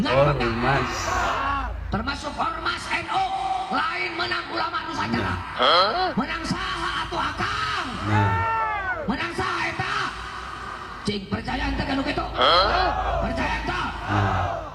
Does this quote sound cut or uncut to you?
uncut